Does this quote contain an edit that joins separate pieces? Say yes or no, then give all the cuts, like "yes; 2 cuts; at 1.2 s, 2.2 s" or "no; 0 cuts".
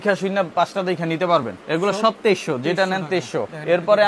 no; 0 cuts